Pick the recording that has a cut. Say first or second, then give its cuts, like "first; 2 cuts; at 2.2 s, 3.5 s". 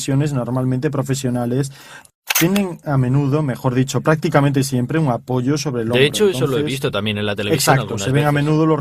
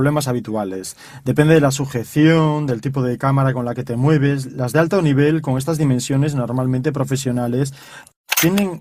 second; 1 cut; at 2.0 s